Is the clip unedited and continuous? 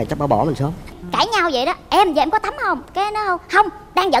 no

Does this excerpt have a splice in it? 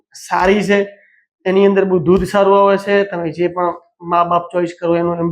no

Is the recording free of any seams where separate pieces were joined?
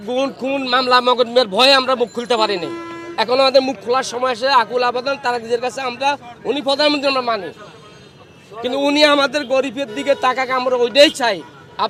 yes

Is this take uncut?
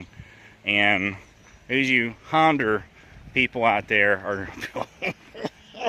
yes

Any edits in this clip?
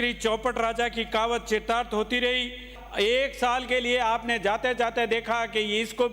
yes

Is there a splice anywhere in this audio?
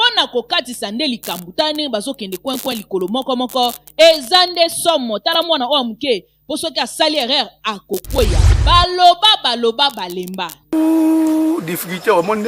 yes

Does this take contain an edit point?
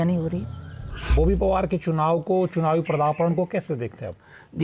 yes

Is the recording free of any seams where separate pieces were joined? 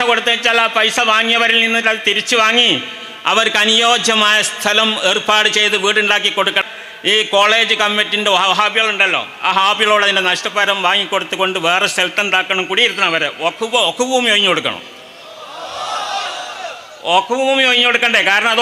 no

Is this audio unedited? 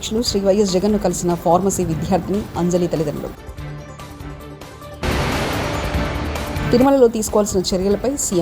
yes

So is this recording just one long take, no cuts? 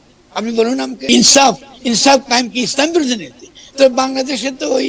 no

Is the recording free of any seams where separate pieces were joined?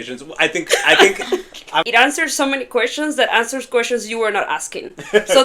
no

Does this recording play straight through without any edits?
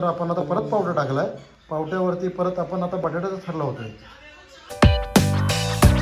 no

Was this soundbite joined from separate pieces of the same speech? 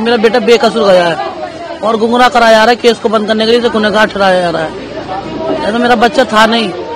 no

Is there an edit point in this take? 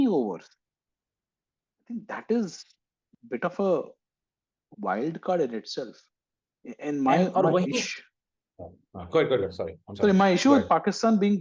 yes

